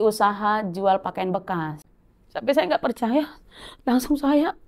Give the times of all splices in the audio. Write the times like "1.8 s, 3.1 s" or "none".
1.8 s